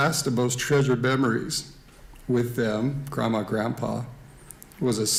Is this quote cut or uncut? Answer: uncut